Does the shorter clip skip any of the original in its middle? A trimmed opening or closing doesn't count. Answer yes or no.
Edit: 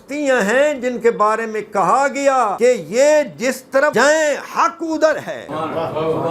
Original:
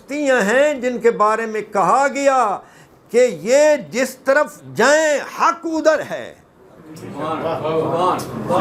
yes